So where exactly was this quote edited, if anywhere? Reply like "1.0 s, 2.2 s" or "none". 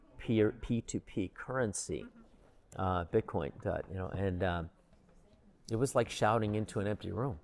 none